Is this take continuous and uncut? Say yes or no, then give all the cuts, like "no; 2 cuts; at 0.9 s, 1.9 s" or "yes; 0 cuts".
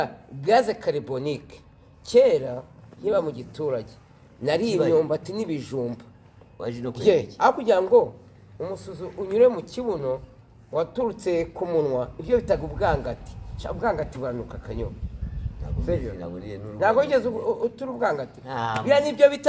yes; 0 cuts